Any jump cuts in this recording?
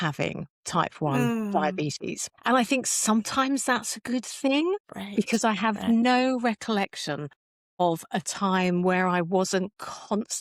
no; 0 cuts

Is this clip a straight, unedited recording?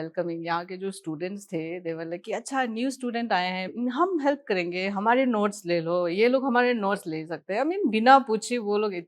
no; 1 cut; at 3.7 s

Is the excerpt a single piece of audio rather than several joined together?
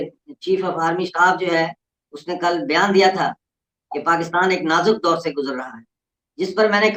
yes; 0 cuts

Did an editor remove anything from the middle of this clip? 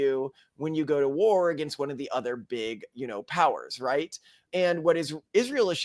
no; 0 cuts

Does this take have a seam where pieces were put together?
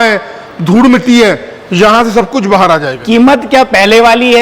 yes; 1 cut; at 2.9 s

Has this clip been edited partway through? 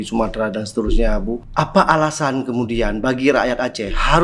yes; 1 cut; at 1.5 s

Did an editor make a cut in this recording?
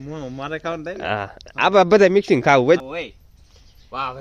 yes; 1 cut; at 2.8 s

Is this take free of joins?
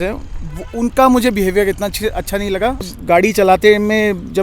no; 1 cut; at 2.9 s

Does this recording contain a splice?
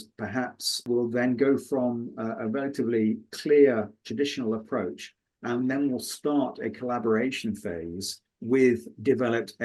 no; 0 cuts

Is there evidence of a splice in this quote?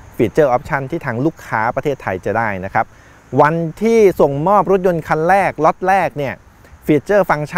no; 0 cuts

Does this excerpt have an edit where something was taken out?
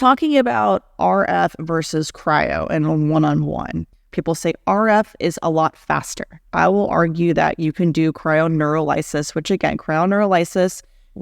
yes; 2 cuts; at 4.0 s, 6.4 s

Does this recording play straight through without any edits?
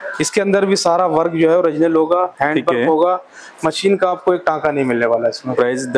yes; 0 cuts

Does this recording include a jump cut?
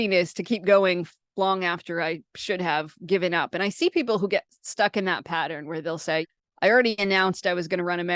yes; 1 cut; at 6.2 s

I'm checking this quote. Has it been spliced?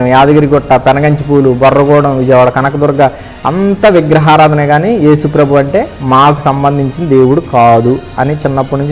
no; 0 cuts

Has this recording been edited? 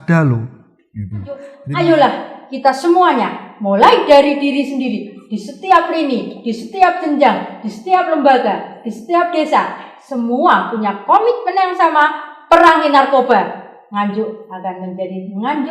yes; 1 cut; at 1.6 s

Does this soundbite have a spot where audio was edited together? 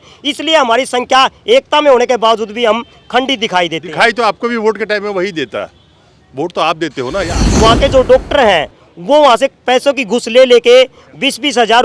yes; 1 cut; at 7.4 s

